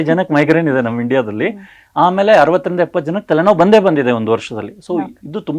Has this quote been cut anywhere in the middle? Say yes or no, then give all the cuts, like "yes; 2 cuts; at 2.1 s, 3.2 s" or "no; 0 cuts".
no; 0 cuts